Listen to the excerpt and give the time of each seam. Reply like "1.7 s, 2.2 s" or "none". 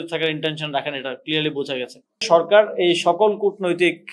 2.2 s